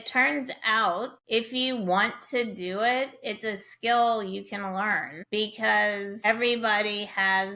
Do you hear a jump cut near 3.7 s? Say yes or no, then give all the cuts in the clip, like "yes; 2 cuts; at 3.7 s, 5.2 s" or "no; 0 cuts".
no; 3 cuts; at 1.2 s, 5.1 s, 6.2 s